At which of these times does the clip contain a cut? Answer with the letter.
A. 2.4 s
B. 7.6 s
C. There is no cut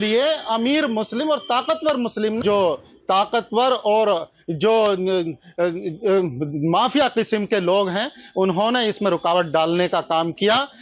A